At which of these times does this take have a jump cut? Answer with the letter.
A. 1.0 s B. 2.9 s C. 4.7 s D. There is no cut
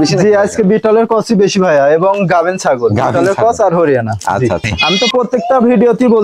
C